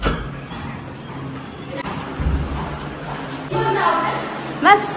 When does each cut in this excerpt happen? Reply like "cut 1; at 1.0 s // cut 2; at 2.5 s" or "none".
cut 1; at 1.8 s // cut 2; at 3.5 s